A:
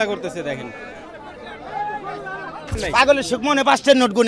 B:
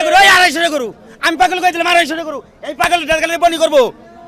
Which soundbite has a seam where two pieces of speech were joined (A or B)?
A